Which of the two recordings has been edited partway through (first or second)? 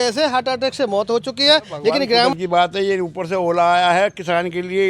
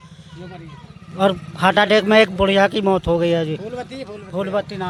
first